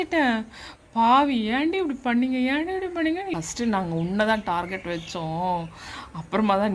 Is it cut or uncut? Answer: cut